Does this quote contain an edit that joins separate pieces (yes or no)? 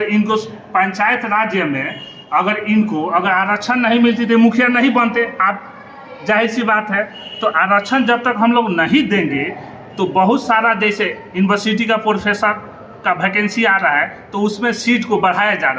no